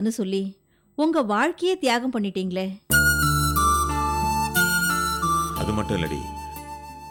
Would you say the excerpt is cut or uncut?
uncut